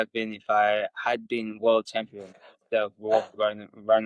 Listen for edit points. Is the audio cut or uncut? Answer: uncut